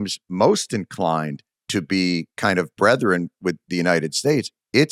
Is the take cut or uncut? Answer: uncut